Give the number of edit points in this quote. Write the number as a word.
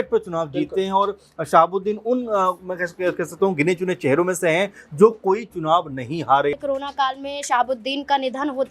one